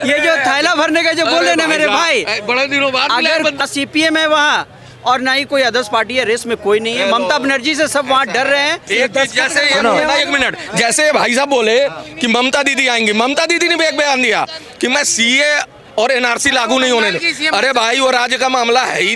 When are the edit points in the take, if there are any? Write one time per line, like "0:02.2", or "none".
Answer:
0:03.6
0:08.9